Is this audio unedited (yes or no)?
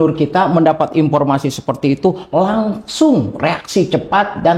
yes